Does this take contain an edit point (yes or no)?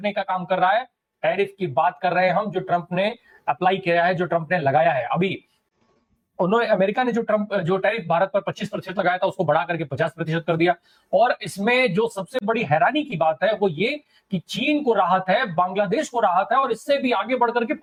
no